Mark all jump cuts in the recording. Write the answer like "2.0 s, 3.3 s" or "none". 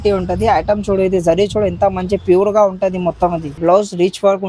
3.5 s